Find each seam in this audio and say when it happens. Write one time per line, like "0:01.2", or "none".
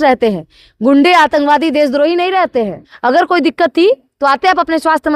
0:02.8